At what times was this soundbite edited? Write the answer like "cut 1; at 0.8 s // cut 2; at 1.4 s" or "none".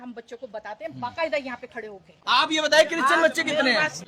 cut 1; at 0.9 s // cut 2; at 2.1 s